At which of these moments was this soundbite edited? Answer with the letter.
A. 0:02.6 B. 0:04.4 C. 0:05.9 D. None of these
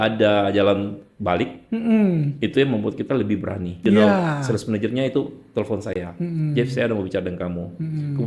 B